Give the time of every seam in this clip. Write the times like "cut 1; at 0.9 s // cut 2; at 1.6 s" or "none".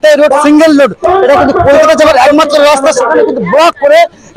none